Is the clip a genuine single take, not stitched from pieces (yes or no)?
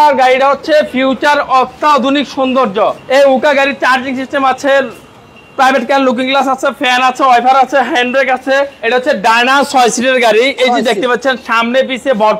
no